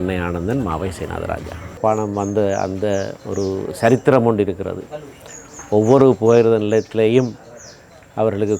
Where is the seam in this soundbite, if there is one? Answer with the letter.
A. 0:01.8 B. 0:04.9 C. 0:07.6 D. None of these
A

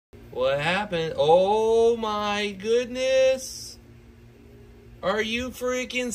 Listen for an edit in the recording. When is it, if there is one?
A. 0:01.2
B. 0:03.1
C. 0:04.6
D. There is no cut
D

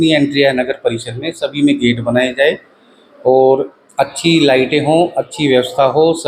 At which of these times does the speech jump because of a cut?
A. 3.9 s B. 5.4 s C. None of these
C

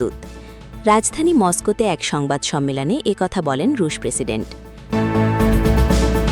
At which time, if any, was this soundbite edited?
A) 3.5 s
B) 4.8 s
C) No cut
B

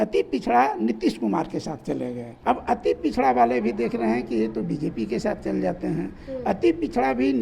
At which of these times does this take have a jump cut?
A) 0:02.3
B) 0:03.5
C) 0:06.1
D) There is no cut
A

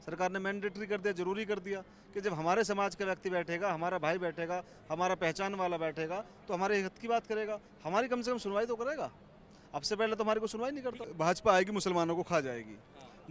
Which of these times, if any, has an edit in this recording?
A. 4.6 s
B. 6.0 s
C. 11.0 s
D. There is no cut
C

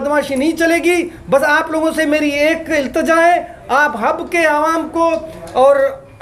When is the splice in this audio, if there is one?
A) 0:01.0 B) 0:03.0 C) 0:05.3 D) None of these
D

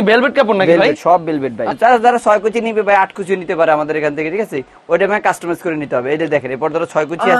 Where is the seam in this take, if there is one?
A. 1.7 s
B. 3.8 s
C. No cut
A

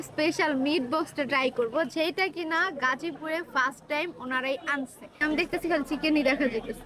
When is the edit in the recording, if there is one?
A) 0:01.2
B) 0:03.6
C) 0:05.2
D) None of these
C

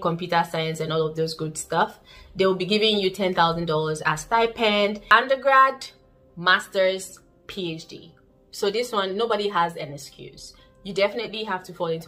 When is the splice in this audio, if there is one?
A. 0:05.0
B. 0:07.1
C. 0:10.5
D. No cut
A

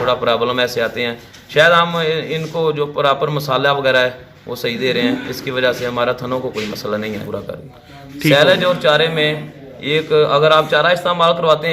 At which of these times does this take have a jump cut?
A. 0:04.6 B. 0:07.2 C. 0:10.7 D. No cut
B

